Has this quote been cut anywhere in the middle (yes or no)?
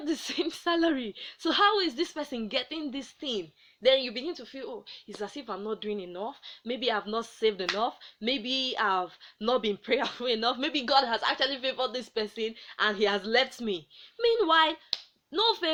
no